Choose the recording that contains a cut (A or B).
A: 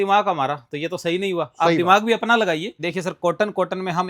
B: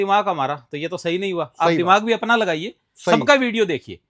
A